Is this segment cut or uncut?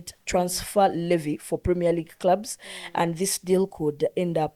uncut